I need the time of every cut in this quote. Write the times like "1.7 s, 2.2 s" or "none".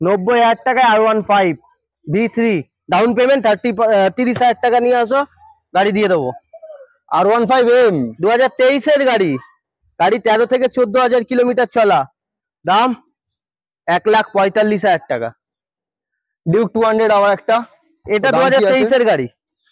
none